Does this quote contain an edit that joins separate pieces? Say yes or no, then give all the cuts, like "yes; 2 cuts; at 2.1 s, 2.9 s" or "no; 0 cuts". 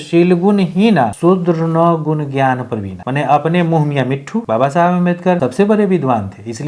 yes; 4 cuts; at 1.1 s, 3.0 s, 4.4 s, 5.4 s